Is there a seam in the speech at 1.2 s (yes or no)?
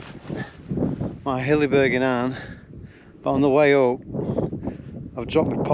no